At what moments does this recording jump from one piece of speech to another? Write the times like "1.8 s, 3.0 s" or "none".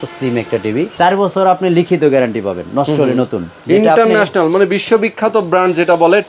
0.9 s, 3.5 s